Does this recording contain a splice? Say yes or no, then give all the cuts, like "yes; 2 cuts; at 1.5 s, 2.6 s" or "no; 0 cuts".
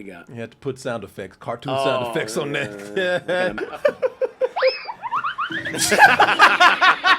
no; 0 cuts